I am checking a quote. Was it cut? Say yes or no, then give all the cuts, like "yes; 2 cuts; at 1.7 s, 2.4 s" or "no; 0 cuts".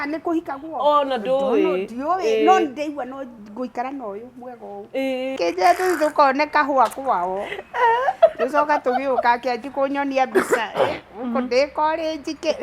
yes; 1 cut; at 5.3 s